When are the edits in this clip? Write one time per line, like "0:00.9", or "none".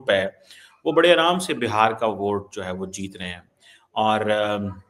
none